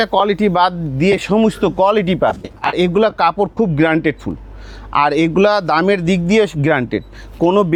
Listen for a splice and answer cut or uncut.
uncut